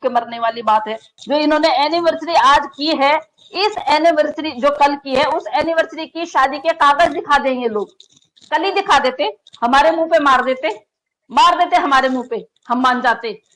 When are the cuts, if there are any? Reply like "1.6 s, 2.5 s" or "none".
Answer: 1.1 s